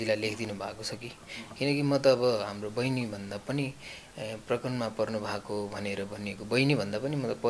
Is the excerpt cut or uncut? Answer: uncut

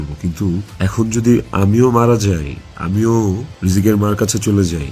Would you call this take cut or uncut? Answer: uncut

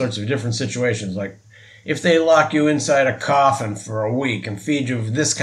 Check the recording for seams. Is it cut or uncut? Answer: uncut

